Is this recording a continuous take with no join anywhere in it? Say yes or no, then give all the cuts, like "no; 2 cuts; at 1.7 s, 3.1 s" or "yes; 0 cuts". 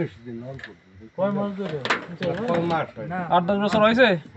yes; 0 cuts